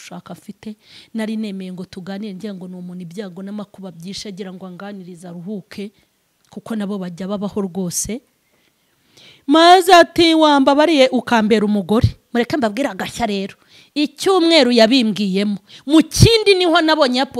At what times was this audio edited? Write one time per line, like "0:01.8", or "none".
none

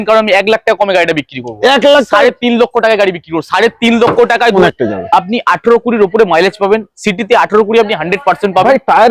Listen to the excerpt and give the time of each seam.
0:04.6

